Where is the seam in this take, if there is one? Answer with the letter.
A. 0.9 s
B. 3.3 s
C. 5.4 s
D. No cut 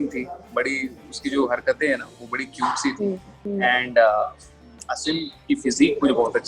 B